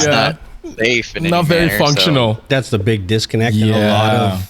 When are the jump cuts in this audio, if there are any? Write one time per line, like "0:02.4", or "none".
0:02.5